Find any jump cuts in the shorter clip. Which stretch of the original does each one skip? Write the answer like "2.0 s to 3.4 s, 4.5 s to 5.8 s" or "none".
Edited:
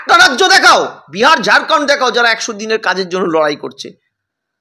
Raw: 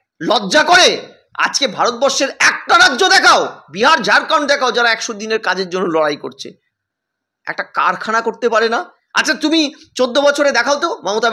none